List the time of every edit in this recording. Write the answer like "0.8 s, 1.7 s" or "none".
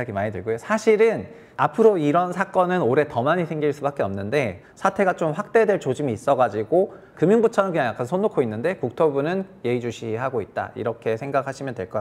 4.6 s, 7.0 s